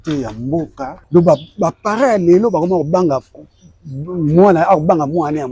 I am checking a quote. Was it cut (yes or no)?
yes